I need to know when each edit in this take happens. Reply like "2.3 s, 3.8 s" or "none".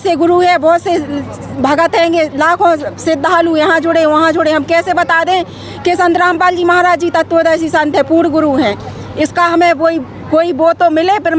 none